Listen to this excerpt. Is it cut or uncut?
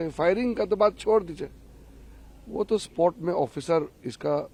uncut